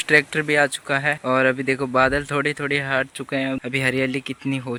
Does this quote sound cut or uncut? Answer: uncut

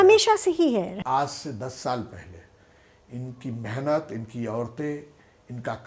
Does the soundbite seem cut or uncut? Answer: cut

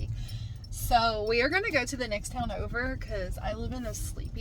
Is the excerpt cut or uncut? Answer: uncut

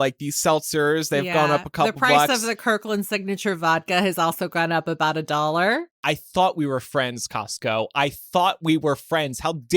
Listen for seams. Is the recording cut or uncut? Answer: cut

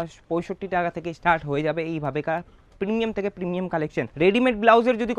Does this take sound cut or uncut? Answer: uncut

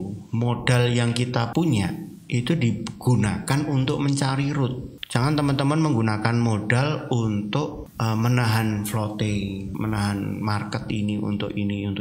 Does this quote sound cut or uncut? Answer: cut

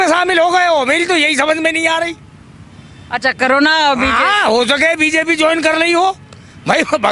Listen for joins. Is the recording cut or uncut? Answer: uncut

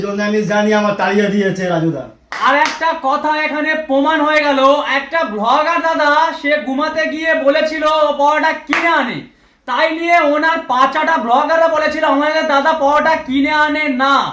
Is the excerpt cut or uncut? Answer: cut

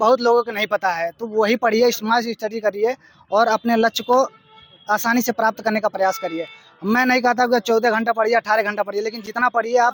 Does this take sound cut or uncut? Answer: uncut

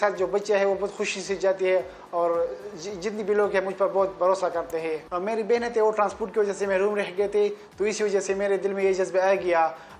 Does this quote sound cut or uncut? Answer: cut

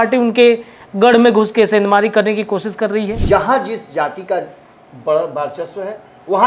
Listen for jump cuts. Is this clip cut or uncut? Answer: cut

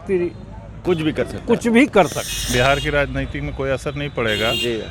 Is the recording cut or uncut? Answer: cut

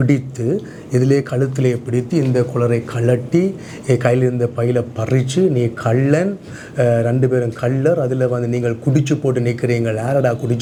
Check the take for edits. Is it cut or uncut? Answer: uncut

